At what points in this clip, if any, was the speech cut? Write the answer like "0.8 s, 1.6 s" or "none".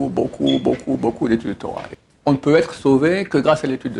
1.9 s

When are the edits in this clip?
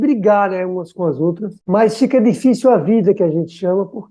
1.5 s

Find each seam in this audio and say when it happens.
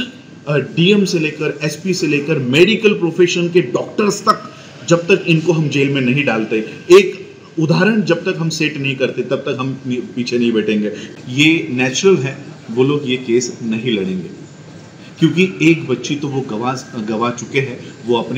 11.0 s

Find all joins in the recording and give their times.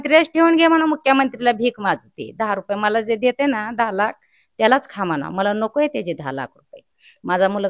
none

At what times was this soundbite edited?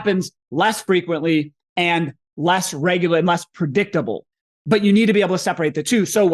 none

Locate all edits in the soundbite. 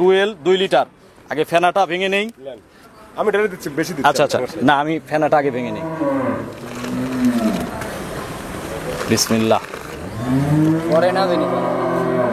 none

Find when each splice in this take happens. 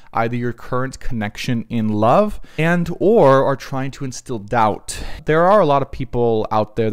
2.4 s, 5.1 s

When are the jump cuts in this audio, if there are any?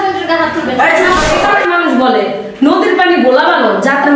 1.4 s

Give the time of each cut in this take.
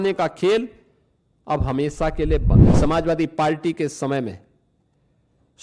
2.7 s

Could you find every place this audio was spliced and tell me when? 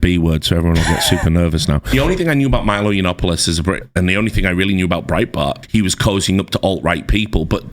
1.9 s, 3.8 s, 5.6 s

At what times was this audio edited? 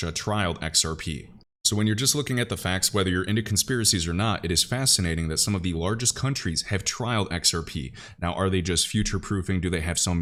none

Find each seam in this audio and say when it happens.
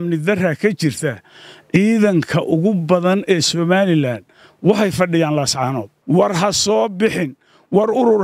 5.9 s

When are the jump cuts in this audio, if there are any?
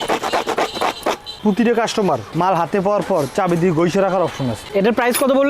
1.3 s, 4.6 s

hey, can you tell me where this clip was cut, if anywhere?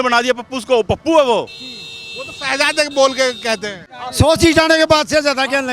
3.8 s

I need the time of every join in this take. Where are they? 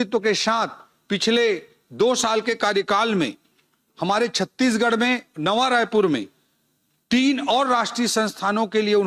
none

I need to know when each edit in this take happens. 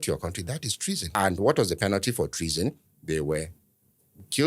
1.0 s

